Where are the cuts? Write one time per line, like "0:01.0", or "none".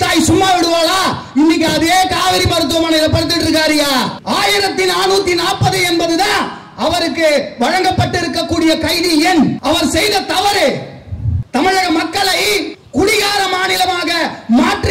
0:04.2
0:09.6
0:11.4
0:12.8